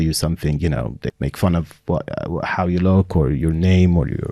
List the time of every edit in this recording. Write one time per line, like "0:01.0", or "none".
0:01.1